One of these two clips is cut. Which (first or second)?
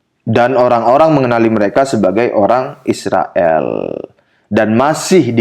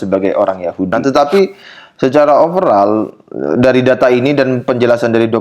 second